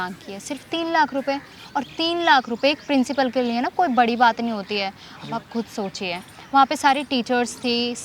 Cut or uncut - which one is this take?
uncut